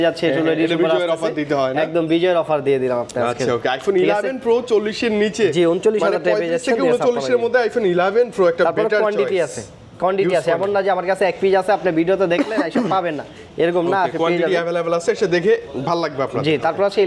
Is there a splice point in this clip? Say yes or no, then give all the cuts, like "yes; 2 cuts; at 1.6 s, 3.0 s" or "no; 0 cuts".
no; 0 cuts